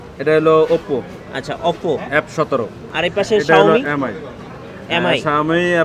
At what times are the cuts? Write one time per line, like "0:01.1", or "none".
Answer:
0:02.8